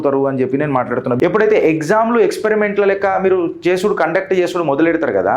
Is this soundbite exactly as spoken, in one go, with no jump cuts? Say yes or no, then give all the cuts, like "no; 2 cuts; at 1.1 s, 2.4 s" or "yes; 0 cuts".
no; 1 cut; at 1.2 s